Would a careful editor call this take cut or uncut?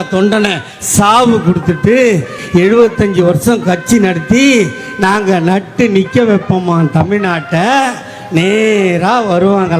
cut